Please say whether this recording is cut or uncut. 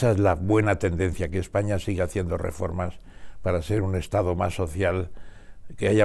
uncut